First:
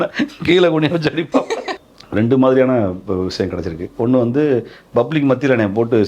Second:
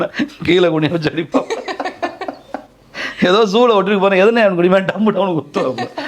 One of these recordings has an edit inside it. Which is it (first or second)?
first